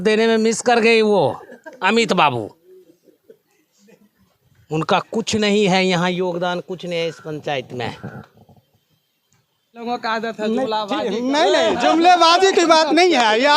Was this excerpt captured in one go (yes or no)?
no